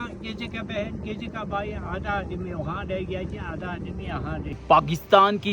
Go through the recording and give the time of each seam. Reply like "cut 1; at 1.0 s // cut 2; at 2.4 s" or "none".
cut 1; at 4.5 s